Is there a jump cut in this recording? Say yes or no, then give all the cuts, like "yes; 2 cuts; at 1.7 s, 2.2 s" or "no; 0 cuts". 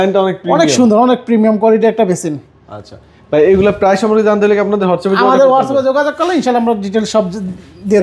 no; 0 cuts